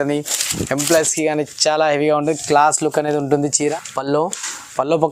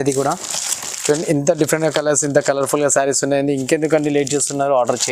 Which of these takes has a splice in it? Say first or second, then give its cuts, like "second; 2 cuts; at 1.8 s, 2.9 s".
first; 1 cut; at 3.8 s